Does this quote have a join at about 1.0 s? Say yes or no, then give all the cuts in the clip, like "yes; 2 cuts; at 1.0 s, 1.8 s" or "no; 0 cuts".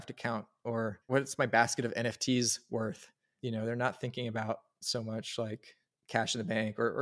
yes; 1 cut; at 1.0 s